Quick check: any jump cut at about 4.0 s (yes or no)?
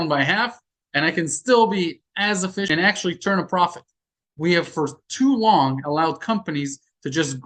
no